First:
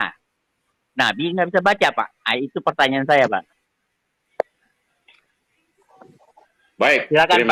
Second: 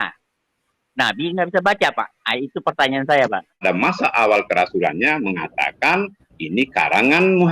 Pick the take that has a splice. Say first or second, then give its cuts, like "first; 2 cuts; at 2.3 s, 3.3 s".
second; 1 cut; at 3.6 s